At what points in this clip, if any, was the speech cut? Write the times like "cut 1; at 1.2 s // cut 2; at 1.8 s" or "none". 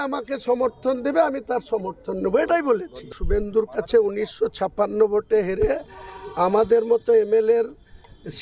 cut 1; at 3.1 s

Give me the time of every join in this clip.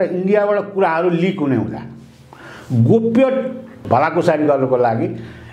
cut 1; at 3.8 s

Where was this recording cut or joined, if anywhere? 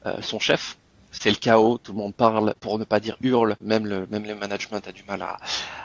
cut 1; at 1.1 s // cut 2; at 2.6 s

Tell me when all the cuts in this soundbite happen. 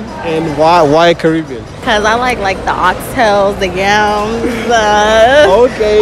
cut 1; at 1.7 s

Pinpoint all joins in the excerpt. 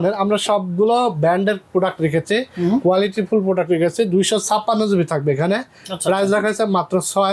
none

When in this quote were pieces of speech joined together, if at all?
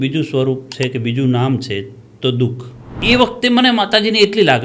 cut 1; at 3.0 s

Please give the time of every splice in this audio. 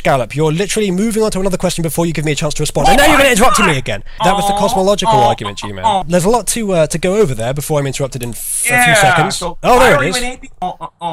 none

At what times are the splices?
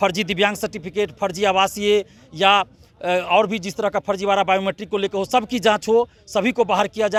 none

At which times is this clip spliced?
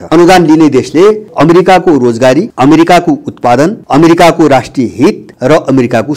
cut 1; at 1.3 s // cut 2; at 2.5 s // cut 3; at 3.8 s // cut 4; at 5.3 s

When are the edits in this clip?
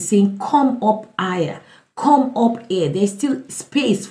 none

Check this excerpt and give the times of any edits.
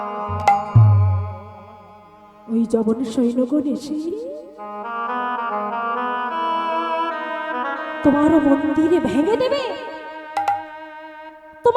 none

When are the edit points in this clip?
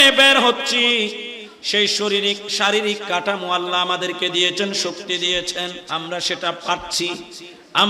cut 1; at 5.8 s

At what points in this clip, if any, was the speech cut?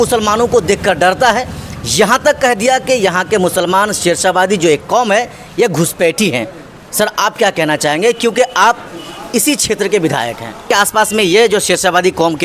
cut 1; at 10.6 s

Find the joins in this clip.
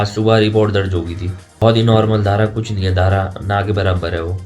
cut 1; at 1.5 s

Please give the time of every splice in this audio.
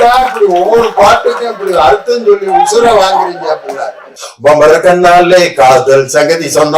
cut 1; at 4.2 s

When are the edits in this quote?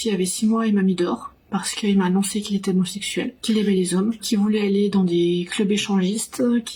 none

